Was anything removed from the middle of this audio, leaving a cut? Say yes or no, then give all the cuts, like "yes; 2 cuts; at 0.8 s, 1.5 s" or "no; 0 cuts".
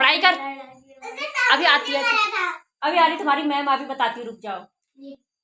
no; 0 cuts